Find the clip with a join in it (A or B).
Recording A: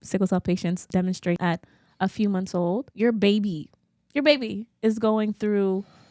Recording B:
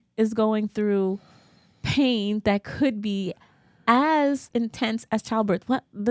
A